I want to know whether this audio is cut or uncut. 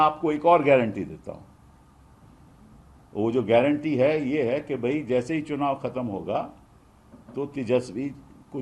uncut